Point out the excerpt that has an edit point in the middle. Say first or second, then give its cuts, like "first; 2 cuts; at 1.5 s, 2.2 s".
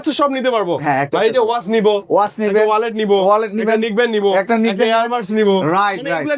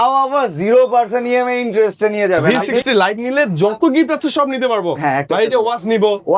second; 1 cut; at 2.9 s